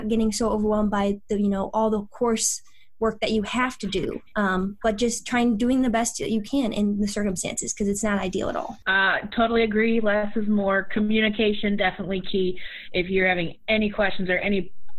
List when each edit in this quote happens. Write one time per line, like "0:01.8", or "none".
none

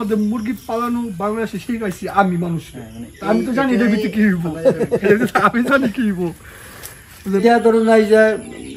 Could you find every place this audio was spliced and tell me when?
0:07.4

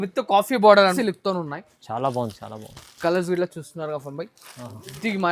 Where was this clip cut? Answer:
0:00.9

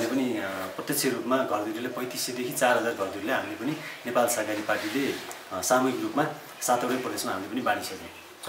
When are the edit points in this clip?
none

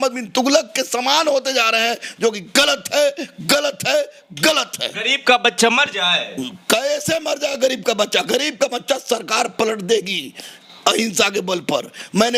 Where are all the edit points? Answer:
none

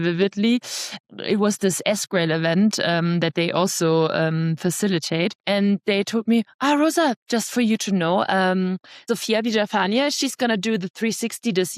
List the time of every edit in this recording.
0:01.0
0:05.4
0:08.9

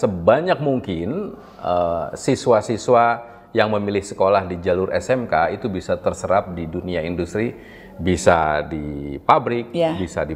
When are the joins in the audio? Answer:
none

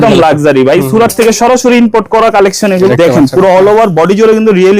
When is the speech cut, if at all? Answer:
0:02.9

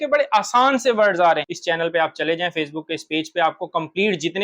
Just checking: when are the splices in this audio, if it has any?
0:01.4

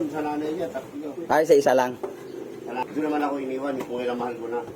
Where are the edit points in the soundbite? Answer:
0:02.8

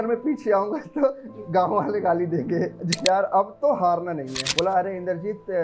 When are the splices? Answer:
0:03.0
0:04.4

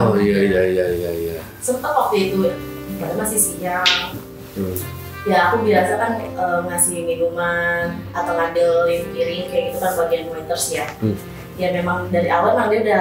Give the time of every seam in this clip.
0:02.8

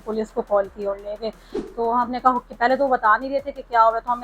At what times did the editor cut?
0:01.5

